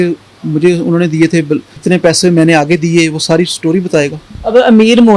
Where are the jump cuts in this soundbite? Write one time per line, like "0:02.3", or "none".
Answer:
0:01.7
0:04.3